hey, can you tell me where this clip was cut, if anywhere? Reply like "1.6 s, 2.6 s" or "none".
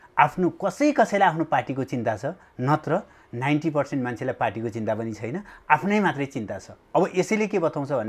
none